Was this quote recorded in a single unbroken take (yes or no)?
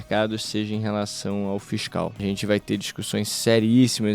no